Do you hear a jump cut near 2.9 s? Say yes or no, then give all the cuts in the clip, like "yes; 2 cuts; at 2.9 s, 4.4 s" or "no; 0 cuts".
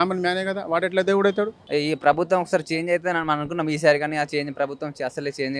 no; 1 cut; at 1.6 s